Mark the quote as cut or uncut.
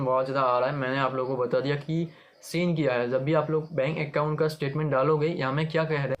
uncut